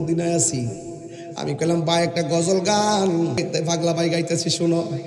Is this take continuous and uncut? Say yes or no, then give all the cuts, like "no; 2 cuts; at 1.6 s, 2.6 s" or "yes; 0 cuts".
no; 1 cut; at 3.4 s